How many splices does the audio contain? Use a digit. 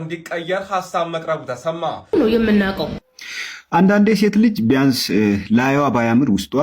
1